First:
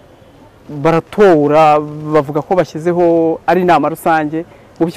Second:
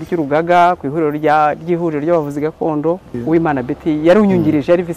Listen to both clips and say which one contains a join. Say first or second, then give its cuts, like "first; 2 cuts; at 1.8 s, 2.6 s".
second; 1 cut; at 3.2 s